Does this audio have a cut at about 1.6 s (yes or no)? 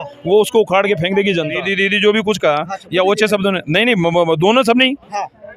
yes